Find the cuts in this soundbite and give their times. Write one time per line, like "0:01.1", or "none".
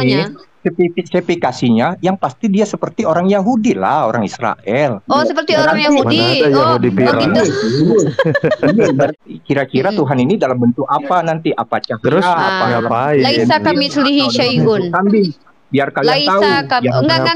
0:09.1